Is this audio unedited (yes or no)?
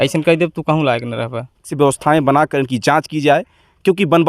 no